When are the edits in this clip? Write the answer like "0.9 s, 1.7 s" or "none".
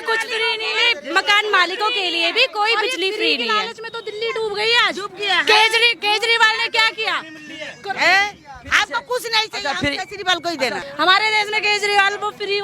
10.8 s